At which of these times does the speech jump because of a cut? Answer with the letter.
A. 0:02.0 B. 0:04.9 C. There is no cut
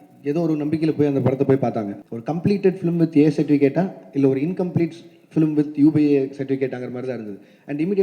A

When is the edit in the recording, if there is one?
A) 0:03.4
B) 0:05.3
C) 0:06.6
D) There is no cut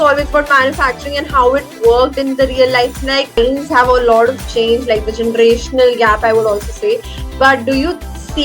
A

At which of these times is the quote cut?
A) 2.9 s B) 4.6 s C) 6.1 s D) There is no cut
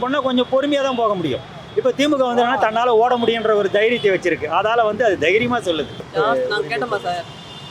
C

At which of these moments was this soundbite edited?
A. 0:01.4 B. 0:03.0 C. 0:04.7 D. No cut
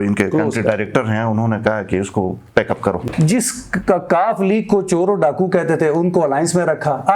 B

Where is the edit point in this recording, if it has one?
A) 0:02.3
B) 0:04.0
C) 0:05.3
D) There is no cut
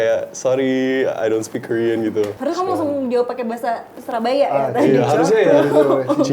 A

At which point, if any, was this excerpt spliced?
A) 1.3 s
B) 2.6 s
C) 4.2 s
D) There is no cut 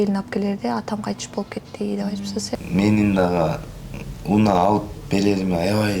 B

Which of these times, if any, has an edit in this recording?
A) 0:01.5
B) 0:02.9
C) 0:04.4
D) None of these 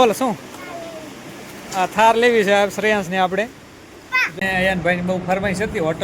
C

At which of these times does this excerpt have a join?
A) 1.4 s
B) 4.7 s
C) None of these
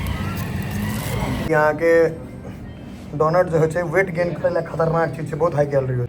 A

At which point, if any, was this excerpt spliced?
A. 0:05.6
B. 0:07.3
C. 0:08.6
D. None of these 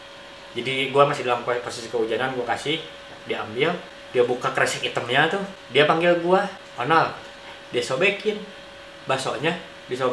A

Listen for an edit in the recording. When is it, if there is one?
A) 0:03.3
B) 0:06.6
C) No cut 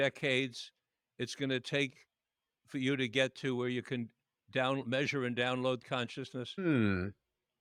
C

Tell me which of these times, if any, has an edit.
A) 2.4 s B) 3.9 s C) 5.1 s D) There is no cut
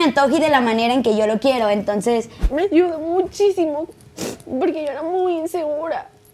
A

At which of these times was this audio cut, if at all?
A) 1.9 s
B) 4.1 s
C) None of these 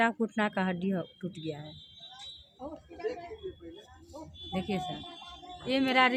C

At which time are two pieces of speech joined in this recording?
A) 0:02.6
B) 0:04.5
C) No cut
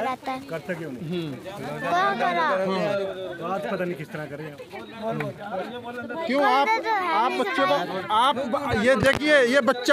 C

